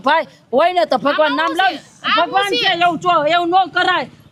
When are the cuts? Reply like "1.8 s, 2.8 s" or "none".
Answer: none